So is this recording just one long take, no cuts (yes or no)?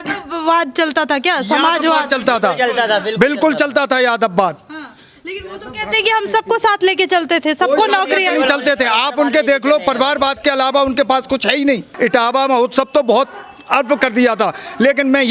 no